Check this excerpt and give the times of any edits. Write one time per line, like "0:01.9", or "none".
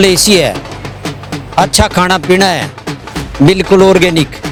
none